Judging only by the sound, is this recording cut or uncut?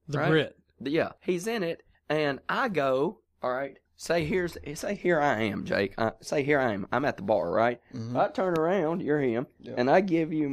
cut